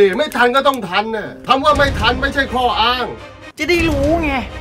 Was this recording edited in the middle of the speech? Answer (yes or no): yes